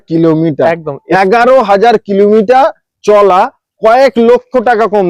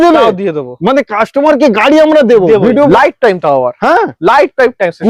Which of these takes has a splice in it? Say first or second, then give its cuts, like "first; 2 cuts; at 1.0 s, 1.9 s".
second; 1 cut; at 2.9 s